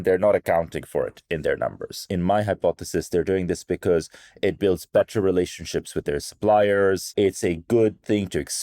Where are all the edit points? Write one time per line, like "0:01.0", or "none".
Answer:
0:02.1
0:07.1